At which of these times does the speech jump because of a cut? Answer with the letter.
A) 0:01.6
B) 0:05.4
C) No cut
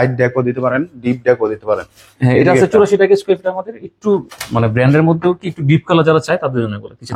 C